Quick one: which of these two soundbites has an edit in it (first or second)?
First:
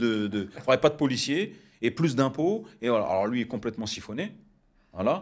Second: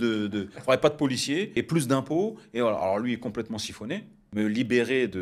second